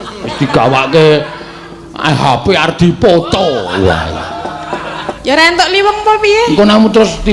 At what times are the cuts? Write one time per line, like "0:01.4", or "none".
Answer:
0:05.1

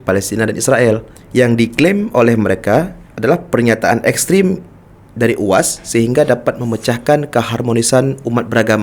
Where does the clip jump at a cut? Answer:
0:01.2
0:03.0

